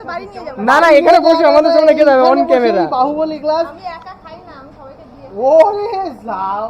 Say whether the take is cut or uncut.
uncut